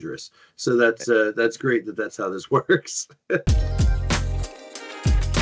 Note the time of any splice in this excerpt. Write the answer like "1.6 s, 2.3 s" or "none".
3.4 s